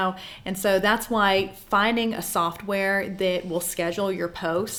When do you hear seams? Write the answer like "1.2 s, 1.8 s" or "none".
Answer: none